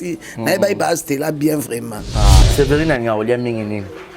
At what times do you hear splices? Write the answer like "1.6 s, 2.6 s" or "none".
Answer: 2.4 s